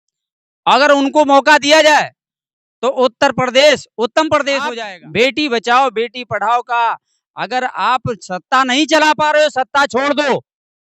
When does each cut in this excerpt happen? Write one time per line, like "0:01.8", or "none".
0:04.8